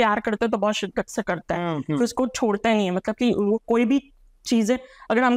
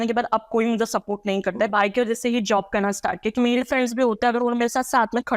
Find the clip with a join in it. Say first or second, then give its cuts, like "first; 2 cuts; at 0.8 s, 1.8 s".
second; 2 cuts; at 1.7 s, 3.3 s